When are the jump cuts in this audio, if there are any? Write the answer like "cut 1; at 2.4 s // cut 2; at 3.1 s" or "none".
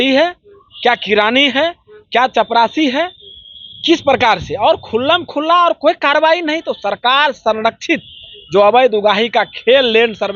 none